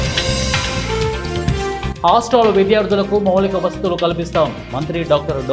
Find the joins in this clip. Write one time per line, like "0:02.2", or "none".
0:01.9